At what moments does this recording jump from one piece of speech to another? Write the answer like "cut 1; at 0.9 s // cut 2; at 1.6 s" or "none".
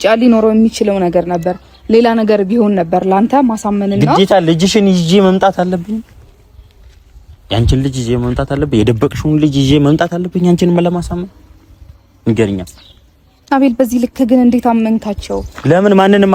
none